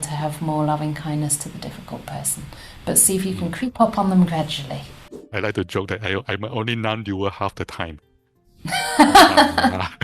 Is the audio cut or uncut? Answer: cut